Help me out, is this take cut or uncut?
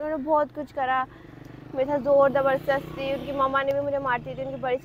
uncut